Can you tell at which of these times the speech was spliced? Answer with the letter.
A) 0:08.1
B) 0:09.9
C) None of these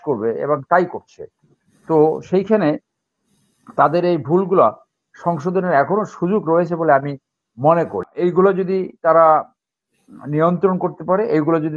A